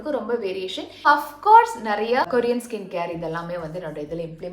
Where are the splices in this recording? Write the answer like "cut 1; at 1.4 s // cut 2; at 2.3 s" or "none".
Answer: cut 1; at 1.0 s // cut 2; at 2.3 s